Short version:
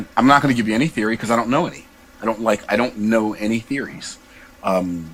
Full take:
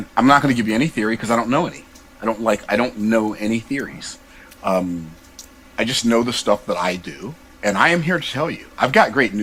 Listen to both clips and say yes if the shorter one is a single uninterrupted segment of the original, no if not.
yes